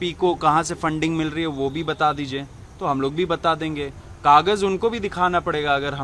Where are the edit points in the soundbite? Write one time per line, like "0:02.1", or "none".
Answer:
none